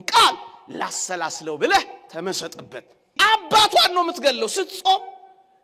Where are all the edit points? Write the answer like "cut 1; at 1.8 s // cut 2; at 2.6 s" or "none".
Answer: cut 1; at 3.1 s